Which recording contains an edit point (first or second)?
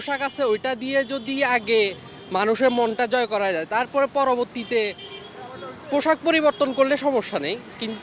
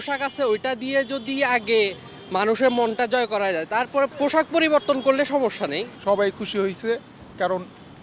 second